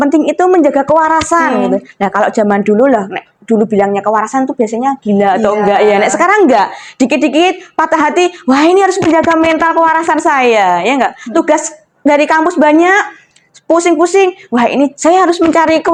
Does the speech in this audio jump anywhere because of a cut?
no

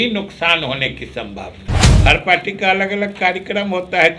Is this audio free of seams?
no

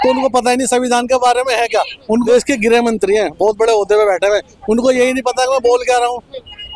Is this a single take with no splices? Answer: no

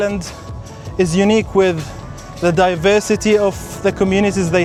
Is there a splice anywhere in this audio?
no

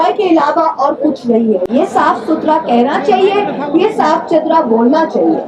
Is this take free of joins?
yes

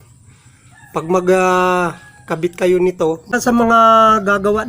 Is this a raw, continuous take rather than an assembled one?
no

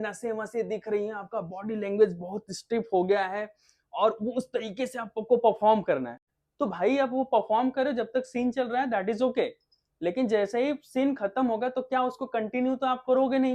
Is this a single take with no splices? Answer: yes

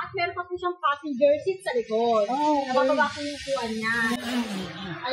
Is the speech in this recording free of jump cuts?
yes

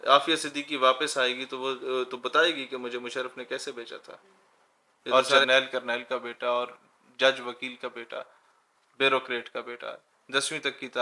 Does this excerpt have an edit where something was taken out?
yes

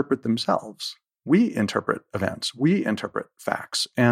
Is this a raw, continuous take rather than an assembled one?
yes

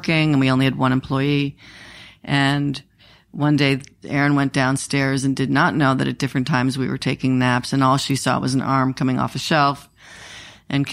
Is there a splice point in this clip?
yes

